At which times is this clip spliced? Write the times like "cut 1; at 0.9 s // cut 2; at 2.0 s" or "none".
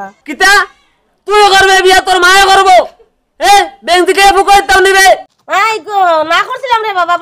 cut 1; at 5.4 s